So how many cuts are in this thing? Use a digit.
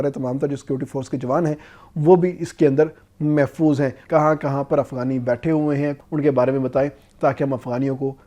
2